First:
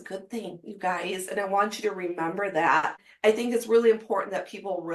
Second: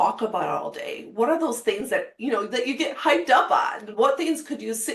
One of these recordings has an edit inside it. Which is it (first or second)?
first